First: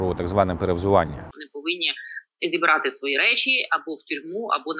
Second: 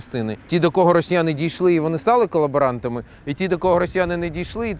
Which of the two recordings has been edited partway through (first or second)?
first